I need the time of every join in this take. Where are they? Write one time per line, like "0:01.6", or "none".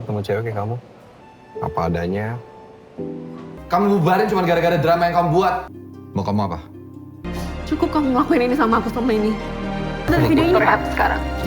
0:03.5
0:07.2